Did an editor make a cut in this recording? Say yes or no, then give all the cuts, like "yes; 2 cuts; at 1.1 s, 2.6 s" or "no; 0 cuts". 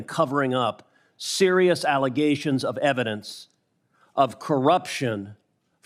no; 0 cuts